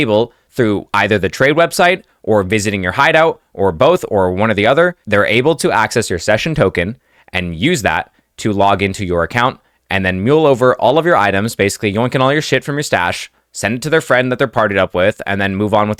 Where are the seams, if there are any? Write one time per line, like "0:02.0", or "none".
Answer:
none